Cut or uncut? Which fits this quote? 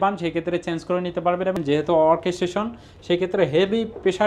cut